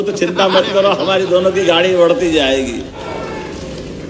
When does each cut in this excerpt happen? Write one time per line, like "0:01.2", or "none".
0:03.0